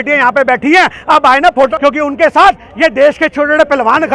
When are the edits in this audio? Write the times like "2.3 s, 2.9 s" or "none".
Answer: 1.7 s